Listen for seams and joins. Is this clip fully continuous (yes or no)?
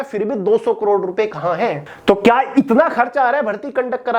no